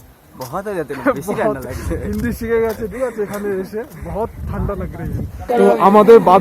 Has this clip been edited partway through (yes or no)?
yes